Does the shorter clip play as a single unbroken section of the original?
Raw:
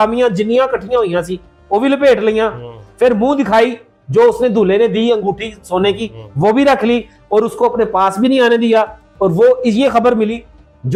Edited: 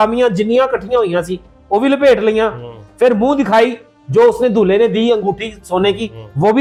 yes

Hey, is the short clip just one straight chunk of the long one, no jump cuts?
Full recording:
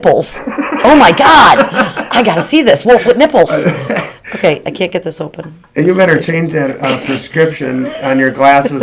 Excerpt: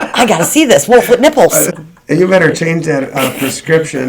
no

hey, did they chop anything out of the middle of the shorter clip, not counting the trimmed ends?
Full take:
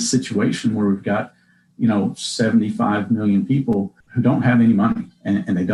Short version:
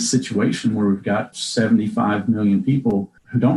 yes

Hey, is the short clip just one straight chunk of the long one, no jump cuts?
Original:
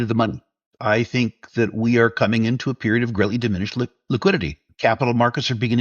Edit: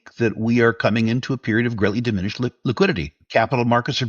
no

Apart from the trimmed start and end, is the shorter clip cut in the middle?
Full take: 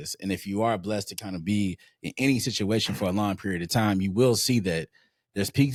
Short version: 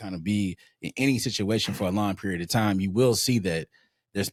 no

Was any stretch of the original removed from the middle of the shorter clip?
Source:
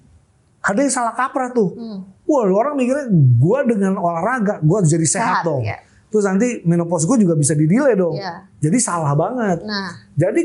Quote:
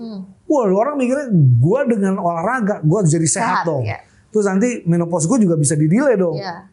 no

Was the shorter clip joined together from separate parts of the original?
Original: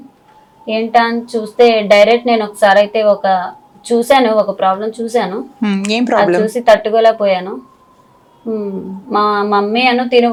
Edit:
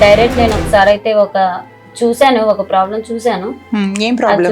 no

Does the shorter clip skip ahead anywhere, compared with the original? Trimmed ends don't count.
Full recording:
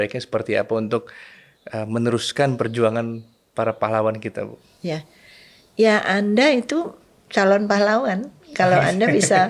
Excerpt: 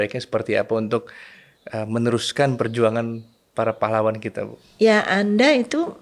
yes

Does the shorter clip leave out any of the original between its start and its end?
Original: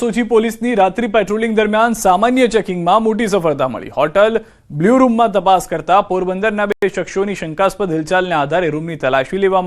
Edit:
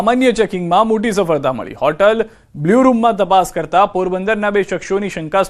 yes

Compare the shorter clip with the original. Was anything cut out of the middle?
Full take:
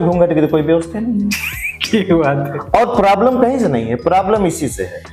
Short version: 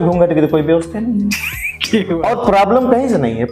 yes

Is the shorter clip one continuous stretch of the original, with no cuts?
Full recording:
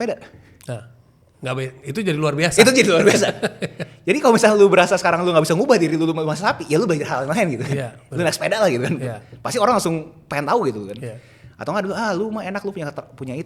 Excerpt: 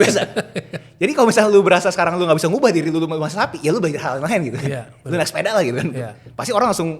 yes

